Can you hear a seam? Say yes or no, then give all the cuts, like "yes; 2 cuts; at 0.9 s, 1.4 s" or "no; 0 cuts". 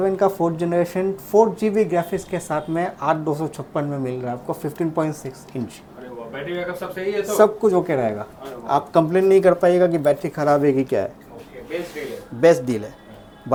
no; 0 cuts